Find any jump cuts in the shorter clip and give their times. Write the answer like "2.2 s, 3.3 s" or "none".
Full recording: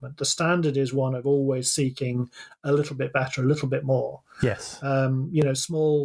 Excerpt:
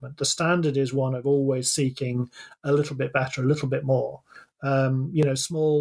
4.4 s

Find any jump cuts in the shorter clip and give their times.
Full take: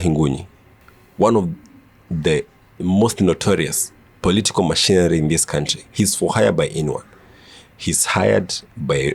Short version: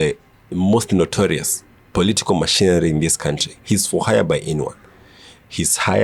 none

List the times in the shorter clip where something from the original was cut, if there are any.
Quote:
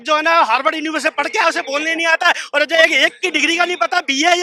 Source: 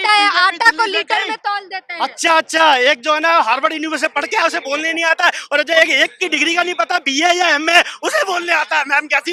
none

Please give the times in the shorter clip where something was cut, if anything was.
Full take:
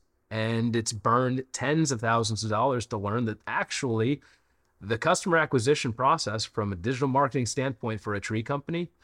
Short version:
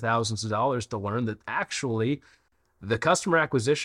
none

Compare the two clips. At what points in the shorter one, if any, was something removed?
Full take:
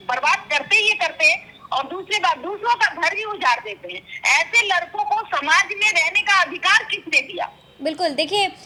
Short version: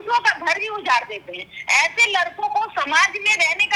none

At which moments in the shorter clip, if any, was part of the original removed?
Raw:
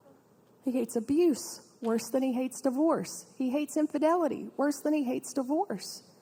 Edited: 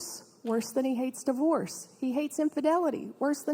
none

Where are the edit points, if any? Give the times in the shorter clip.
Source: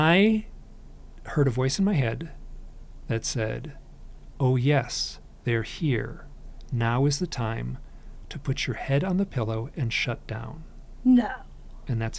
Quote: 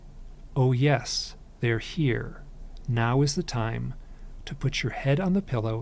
none

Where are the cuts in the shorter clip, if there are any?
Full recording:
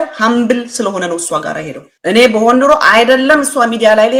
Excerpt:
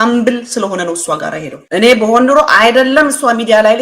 1.5 s

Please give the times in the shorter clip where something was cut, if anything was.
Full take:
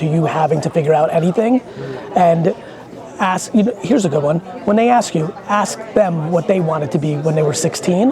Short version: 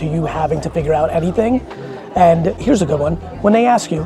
2.6 s

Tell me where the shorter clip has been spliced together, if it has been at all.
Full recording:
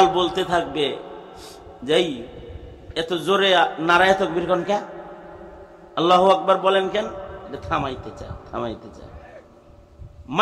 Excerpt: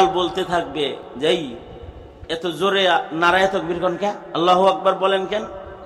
1.1 s, 4.2 s

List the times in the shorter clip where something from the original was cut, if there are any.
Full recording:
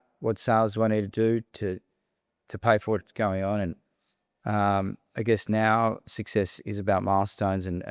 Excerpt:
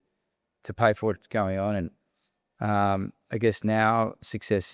none

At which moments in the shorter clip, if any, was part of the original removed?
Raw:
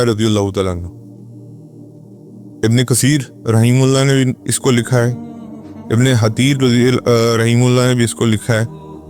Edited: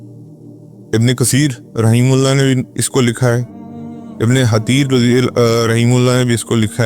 0.9 s

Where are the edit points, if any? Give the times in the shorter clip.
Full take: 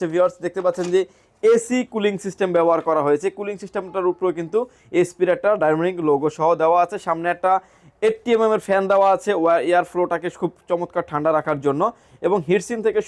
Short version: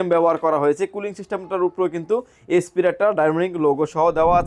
none

